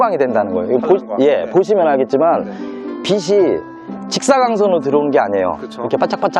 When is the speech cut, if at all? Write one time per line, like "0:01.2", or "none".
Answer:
none